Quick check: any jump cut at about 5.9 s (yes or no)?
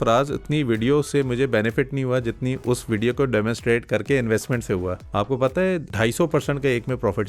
yes